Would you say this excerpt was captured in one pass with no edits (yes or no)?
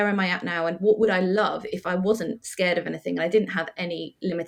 yes